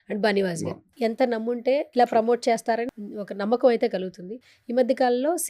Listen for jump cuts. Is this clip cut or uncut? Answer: cut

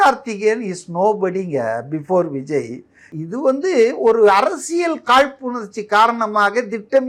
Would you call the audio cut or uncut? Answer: cut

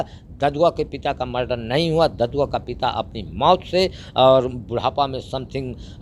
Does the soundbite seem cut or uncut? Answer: uncut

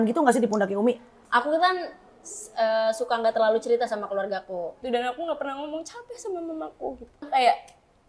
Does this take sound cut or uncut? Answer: cut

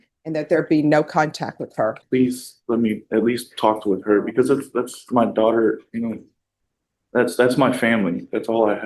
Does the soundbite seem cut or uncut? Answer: cut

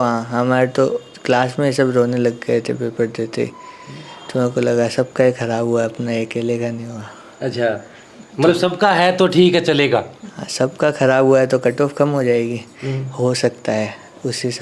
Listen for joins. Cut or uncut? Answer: uncut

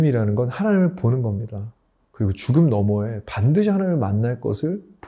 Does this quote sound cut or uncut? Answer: uncut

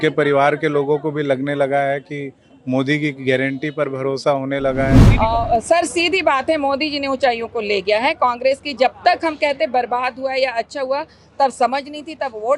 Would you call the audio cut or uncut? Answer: cut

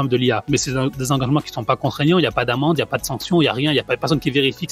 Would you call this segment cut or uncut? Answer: uncut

